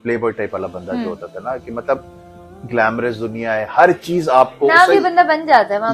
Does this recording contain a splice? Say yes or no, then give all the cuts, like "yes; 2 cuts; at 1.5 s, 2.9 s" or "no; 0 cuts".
no; 0 cuts